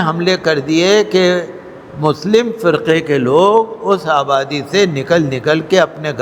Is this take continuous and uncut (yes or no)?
yes